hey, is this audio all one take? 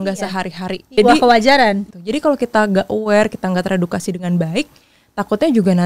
no; 2 cuts; at 1.0 s, 1.8 s

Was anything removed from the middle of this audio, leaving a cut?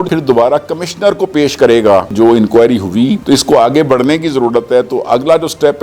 yes; 1 cut; at 2.1 s

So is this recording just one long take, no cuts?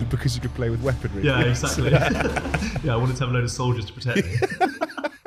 yes; 0 cuts

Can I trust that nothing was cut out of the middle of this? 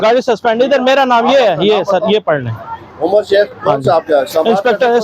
yes; 0 cuts

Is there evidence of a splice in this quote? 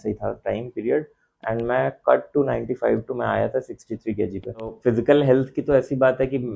yes; 1 cut; at 4.8 s

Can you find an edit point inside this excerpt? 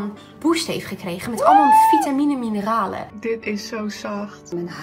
yes; 1 cut; at 3.0 s

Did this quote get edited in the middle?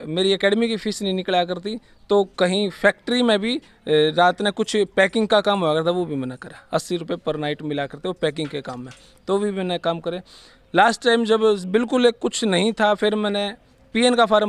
no; 0 cuts

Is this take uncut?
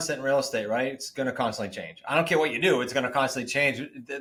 yes; 0 cuts

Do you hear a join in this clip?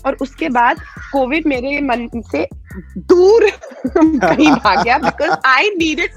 no; 0 cuts

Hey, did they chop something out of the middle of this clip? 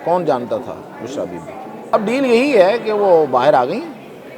yes; 1 cut; at 1.9 s

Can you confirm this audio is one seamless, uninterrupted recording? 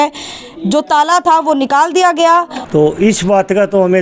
no; 1 cut; at 2.6 s

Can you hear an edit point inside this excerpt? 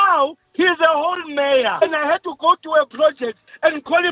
yes; 1 cut; at 1.8 s

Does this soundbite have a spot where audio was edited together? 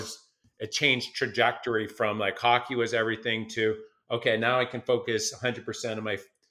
no; 0 cuts

